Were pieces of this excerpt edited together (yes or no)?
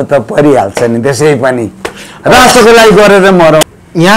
no